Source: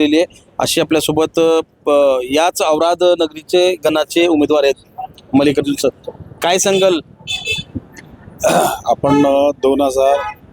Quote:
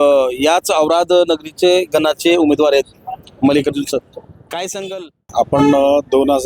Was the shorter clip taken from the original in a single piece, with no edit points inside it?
no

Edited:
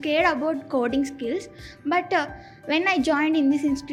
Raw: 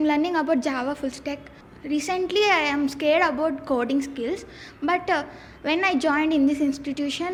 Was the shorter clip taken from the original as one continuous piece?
yes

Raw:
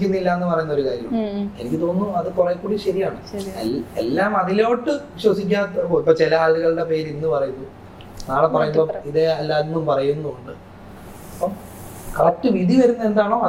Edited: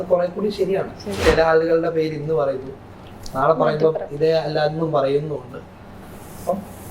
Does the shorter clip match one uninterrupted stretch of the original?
no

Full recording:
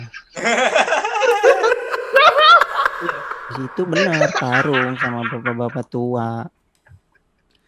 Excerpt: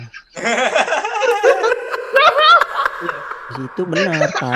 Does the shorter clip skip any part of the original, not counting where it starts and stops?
no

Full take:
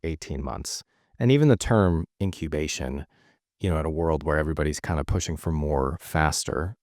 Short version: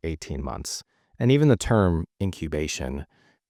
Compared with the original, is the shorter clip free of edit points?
yes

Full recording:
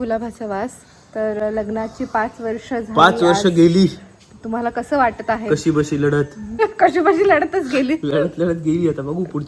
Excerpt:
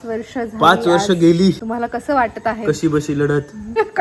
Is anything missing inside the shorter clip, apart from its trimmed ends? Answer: yes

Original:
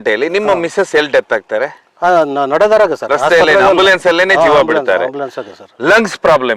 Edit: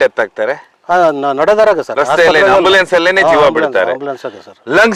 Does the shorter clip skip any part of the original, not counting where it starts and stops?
no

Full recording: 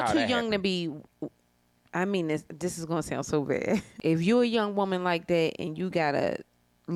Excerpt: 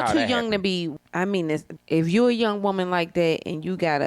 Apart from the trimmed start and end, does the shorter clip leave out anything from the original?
yes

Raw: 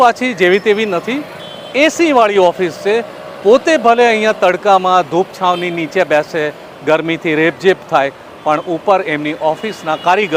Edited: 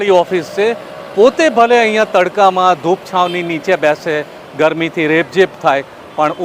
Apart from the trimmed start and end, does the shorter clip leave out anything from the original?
no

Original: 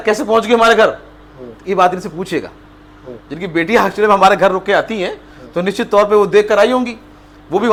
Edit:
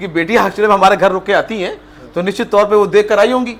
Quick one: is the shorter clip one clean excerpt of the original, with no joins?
yes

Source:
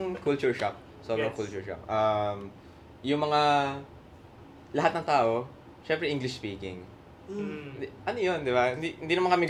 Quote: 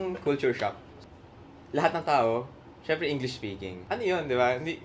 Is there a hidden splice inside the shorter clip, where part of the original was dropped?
yes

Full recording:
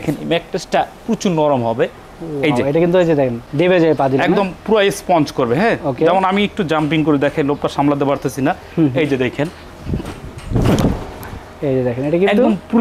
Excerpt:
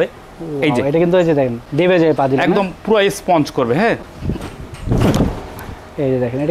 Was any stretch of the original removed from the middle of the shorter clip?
yes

